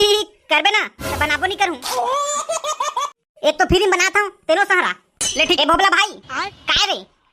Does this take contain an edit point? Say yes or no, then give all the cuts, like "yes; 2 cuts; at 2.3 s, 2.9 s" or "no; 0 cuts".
yes; 1 cut; at 5.6 s